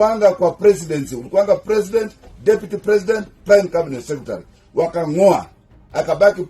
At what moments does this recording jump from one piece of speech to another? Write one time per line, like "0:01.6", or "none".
none